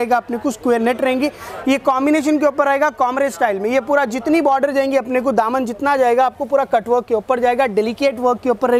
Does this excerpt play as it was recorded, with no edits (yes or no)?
yes